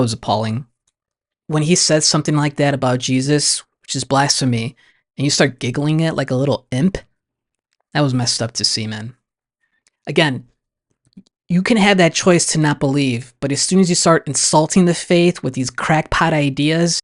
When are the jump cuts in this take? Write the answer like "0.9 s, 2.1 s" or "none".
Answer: none